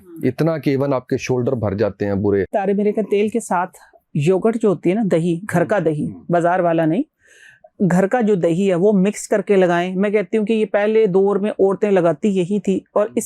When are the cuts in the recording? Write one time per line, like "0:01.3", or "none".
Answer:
0:02.5